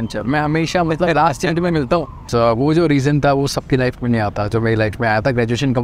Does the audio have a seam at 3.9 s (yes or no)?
no